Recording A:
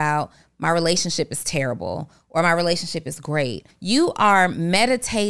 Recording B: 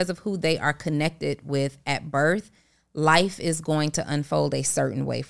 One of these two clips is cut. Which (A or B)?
A